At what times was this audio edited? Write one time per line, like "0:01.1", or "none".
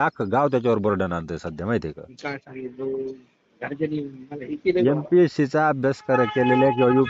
none